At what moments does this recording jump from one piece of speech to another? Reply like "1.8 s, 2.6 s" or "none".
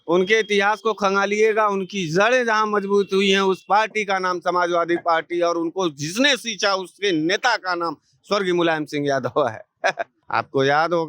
10.1 s